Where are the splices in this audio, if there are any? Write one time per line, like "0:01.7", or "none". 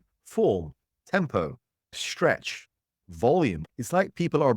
0:03.6